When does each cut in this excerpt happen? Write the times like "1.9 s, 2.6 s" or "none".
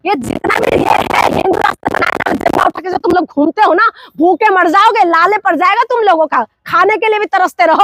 none